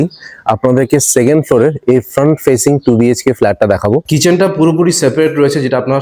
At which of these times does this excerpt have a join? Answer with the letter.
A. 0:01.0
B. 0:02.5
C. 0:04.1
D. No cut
C